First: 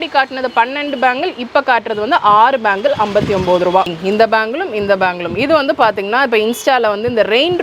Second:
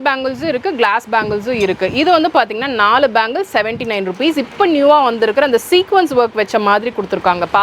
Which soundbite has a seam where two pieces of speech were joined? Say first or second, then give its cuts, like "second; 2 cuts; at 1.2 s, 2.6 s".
first; 1 cut; at 4.0 s